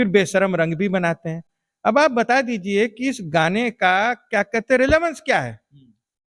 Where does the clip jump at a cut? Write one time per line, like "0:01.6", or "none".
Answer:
none

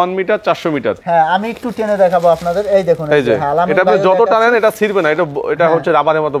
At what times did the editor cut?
0:01.0

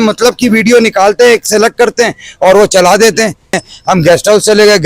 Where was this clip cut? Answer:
0:03.7

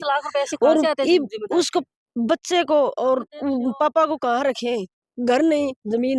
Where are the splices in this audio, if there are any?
none

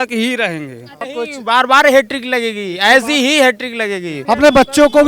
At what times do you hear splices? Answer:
0:04.1

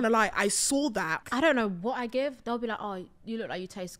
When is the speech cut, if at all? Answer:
0:01.2

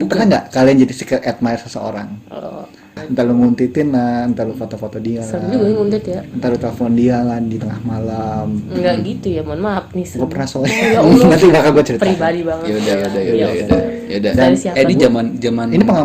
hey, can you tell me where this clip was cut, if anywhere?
0:02.9

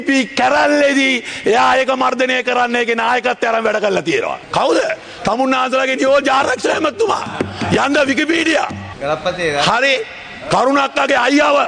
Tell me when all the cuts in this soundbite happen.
0:08.8

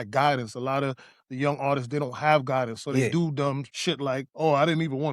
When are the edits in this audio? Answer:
0:03.7

